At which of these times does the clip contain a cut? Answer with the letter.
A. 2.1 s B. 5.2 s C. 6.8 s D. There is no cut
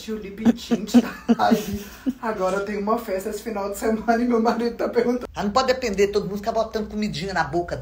B